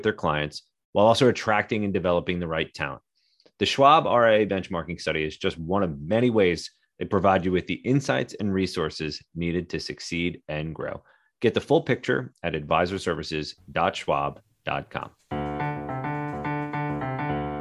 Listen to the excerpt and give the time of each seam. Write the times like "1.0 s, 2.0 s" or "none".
15.2 s